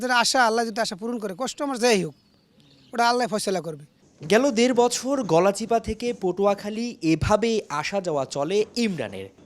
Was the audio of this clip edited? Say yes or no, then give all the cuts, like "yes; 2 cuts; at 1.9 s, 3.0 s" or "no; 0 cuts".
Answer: no; 0 cuts